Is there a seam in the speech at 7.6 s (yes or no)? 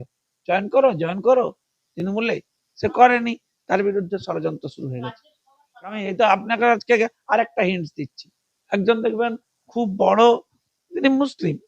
no